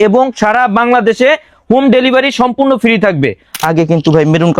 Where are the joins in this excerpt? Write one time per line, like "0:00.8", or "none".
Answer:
0:03.6